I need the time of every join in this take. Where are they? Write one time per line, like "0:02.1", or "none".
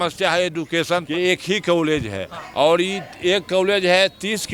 0:01.1